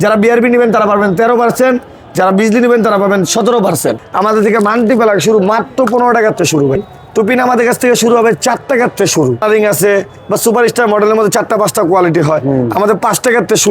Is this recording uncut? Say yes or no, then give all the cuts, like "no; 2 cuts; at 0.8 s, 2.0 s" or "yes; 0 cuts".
no; 3 cuts; at 4.1 s, 6.8 s, 9.4 s